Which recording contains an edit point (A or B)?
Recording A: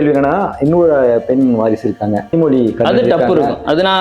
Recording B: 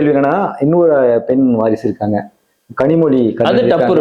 A